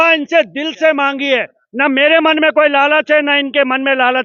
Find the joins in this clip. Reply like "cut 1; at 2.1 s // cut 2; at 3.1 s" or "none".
none

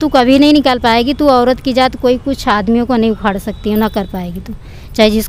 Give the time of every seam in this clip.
none

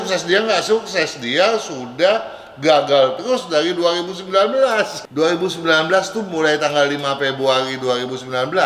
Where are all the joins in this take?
cut 1; at 5.0 s

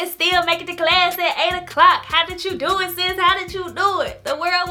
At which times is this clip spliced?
none

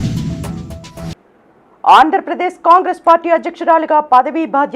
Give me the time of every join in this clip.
none

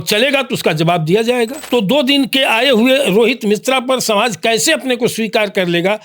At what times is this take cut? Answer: cut 1; at 1.6 s

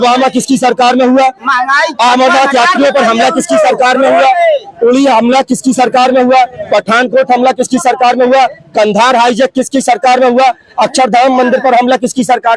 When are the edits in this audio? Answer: none

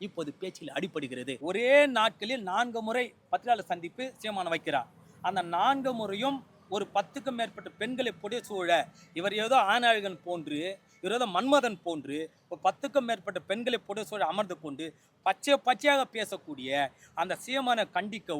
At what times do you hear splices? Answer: cut 1; at 1.3 s

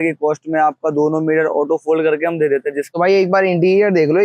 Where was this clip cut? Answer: cut 1; at 2.8 s

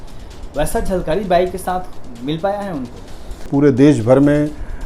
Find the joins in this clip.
cut 1; at 3.4 s

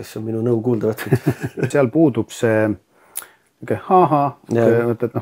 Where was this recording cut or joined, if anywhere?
cut 1; at 1.7 s

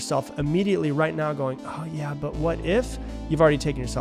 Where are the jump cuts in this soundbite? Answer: none

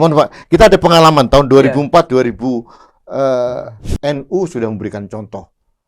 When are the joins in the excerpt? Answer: cut 1; at 3.8 s

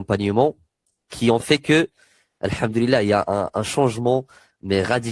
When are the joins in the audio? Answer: none

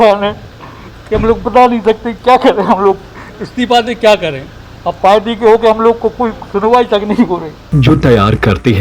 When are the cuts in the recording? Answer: cut 1; at 7.6 s

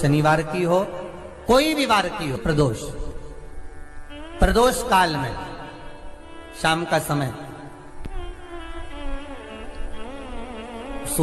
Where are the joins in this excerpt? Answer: cut 1; at 2.4 s

